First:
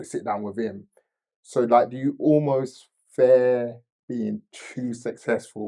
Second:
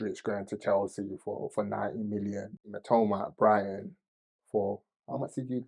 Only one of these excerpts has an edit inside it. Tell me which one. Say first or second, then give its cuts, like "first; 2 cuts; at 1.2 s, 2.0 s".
second; 1 cut; at 2.7 s